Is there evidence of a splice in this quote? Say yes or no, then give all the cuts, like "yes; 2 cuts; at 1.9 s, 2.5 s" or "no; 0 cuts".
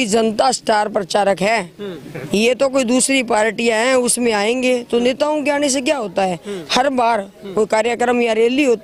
no; 0 cuts